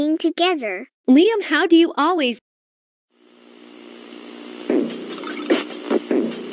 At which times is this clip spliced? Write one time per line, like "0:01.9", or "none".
0:02.4